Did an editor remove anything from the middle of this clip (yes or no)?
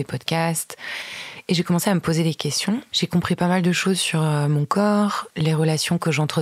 yes